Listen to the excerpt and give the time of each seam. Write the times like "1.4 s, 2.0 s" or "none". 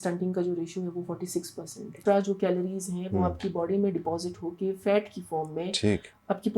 1.9 s

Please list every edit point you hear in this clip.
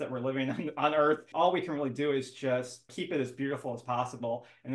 1.3 s, 2.9 s

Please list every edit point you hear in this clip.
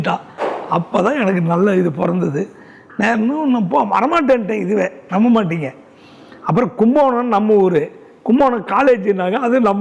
none

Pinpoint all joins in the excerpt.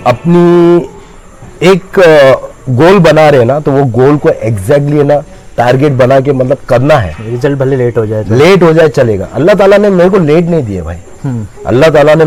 none

